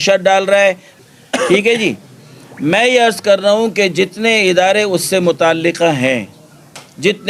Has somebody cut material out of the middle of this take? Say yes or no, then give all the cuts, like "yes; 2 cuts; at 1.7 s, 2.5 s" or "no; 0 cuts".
yes; 1 cut; at 1.0 s